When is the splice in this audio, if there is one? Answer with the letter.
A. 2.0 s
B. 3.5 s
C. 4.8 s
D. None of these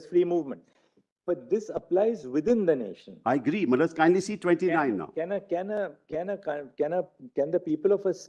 D